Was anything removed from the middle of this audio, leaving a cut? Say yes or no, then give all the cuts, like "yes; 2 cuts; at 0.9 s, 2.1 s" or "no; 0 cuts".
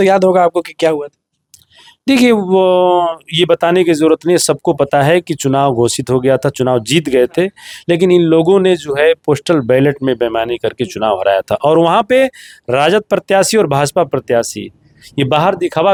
no; 0 cuts